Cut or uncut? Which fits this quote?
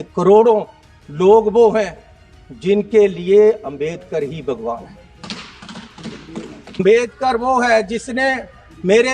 cut